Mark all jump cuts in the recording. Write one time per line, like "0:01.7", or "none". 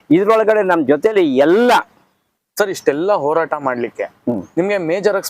0:02.4